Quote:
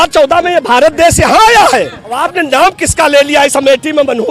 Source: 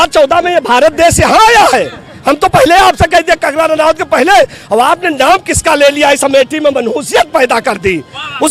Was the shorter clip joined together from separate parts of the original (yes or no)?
yes